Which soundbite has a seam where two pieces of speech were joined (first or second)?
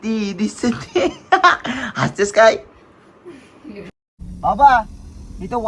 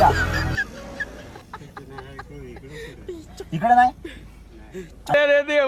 first